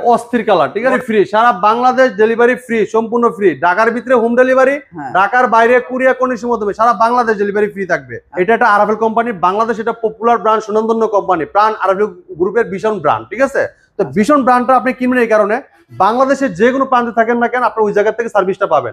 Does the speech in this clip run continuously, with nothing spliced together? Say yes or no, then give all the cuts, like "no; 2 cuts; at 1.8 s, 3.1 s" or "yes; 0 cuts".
no; 2 cuts; at 1.0 s, 8.2 s